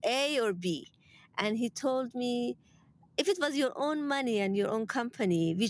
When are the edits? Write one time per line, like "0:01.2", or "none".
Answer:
none